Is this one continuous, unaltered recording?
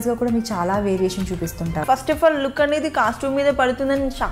no; 1 cut; at 1.8 s

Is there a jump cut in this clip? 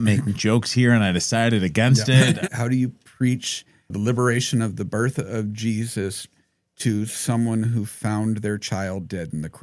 yes; 2 cuts; at 2.4 s, 3.9 s

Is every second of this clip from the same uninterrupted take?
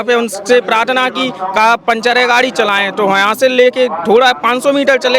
yes; 0 cuts

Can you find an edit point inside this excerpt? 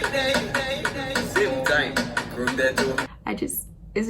yes; 1 cut; at 3.1 s

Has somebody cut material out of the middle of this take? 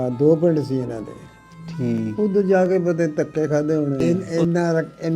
yes; 1 cut; at 4.0 s

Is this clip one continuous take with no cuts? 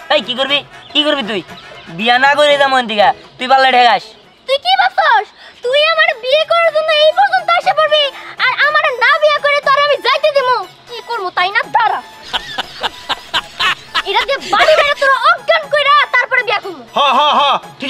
yes; 0 cuts

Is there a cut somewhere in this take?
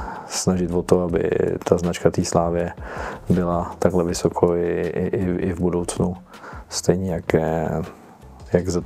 no; 0 cuts

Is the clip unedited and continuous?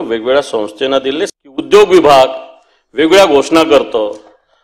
no; 1 cut; at 1.3 s

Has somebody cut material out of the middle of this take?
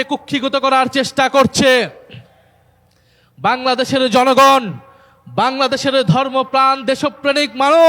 no; 0 cuts

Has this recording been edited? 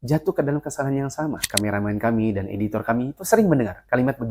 yes; 1 cut; at 1.4 s

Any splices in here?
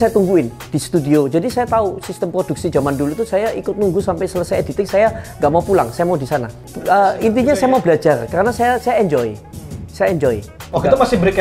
no; 0 cuts

